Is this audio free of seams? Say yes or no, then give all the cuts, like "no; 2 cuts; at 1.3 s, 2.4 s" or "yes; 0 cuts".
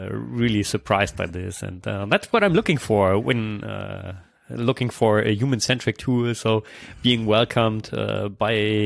yes; 0 cuts